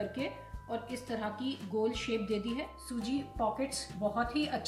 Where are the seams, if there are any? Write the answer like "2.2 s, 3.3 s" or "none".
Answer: 2.7 s